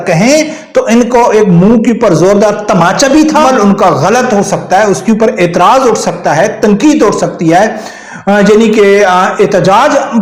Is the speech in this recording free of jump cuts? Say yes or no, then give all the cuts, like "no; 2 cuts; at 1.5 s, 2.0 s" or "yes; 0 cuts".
no; 1 cut; at 3.4 s